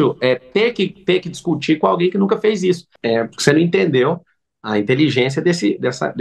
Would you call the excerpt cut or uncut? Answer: cut